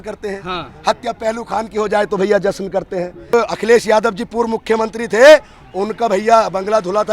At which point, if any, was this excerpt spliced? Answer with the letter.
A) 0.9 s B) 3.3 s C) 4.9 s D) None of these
B